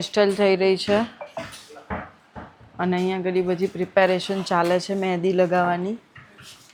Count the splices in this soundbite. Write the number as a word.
zero